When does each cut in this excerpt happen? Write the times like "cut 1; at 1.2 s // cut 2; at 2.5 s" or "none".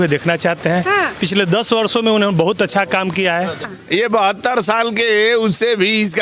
cut 1; at 3.8 s